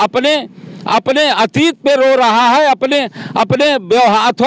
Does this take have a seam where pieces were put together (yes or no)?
no